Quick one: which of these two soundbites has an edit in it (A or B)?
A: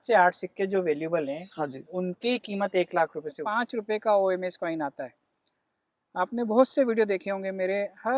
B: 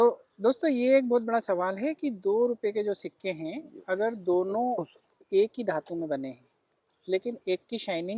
A